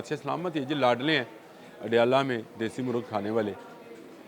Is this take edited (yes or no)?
no